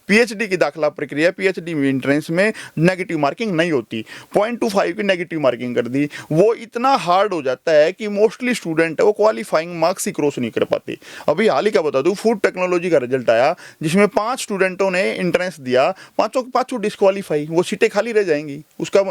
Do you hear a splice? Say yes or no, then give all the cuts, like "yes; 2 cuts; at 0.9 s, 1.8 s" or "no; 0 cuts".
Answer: no; 0 cuts